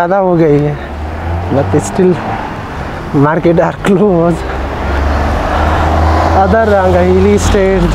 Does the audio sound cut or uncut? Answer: uncut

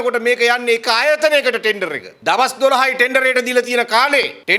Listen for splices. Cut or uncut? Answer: uncut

